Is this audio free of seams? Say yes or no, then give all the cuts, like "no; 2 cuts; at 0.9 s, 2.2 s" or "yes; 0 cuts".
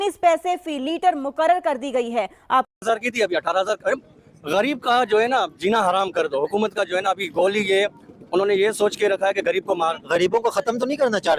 no; 1 cut; at 2.7 s